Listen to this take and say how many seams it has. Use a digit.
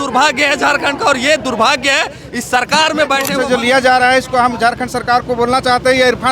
1